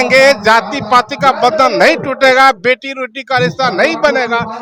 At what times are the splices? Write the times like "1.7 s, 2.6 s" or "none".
none